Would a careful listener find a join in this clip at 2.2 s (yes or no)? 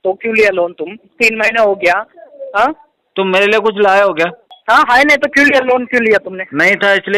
no